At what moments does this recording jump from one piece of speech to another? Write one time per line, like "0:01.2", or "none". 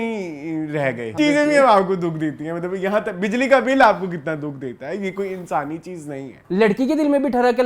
0:01.1
0:06.4